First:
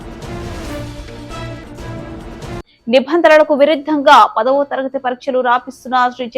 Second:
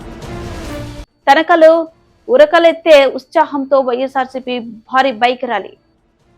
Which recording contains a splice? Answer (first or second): first